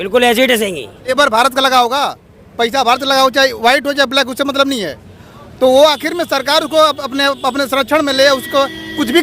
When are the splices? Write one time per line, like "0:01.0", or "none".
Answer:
0:01.1